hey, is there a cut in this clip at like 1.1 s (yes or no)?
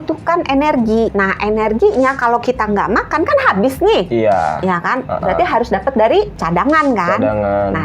yes